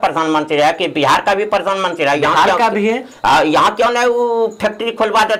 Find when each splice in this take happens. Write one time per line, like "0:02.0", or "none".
none